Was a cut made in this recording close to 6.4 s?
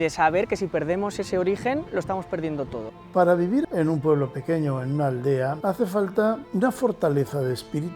yes; 4 cuts; at 2.8 s, 3.6 s, 5.6 s, 6.4 s

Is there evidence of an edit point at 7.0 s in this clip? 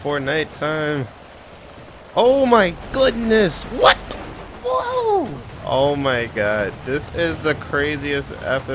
no; 1 cut; at 5.5 s

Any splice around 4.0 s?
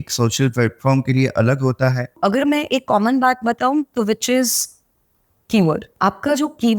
no; 2 cuts; at 2.1 s, 5.9 s

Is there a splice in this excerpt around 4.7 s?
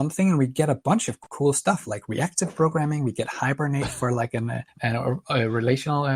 yes; 2 cuts; at 1.2 s, 4.7 s

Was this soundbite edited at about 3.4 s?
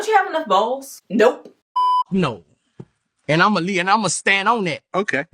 no; 2 cuts; at 0.9 s, 1.5 s

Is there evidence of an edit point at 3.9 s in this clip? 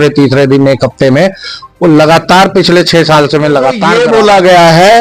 yes; 1 cut; at 3.9 s

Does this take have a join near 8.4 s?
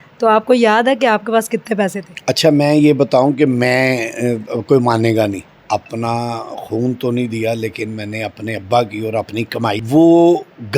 no; 3 cuts; at 2.1 s, 5.5 s, 9.8 s

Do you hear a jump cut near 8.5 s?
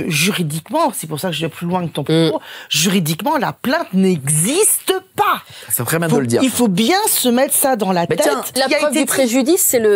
yes; 1 cut; at 8.5 s

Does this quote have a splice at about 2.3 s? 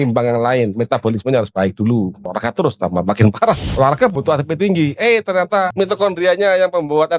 yes; 3 cuts; at 2.3 s, 3.7 s, 5.7 s

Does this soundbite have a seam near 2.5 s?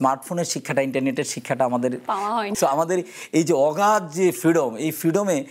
yes; 1 cut; at 2.5 s

